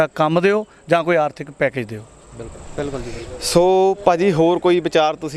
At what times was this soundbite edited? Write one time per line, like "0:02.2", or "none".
none